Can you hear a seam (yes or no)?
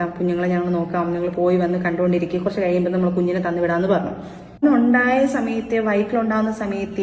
yes